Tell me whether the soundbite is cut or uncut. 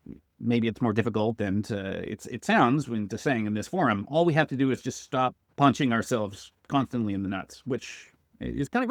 uncut